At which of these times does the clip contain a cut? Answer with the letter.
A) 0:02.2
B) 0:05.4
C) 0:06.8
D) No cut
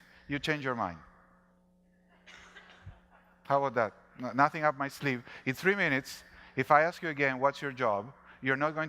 A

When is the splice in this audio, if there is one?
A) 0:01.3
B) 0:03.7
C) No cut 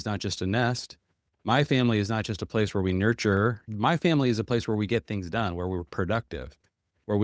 B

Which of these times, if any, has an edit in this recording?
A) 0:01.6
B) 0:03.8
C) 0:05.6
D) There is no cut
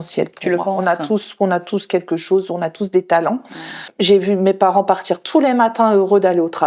B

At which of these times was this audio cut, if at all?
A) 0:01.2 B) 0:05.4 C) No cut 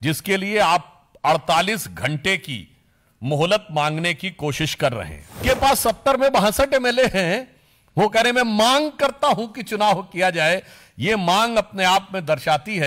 B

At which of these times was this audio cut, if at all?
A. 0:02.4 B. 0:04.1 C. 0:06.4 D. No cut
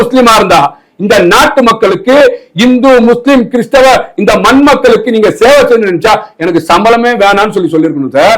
D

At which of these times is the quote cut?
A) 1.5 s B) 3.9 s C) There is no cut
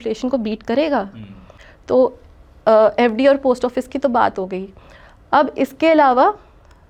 C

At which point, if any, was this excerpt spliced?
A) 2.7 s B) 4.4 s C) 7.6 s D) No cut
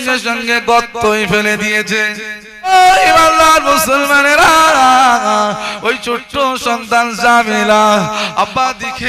A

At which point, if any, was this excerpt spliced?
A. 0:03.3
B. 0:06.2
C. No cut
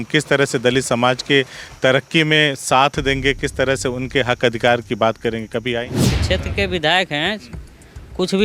B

